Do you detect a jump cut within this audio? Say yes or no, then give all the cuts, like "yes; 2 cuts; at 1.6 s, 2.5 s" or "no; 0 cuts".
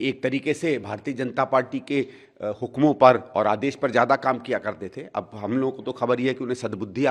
no; 0 cuts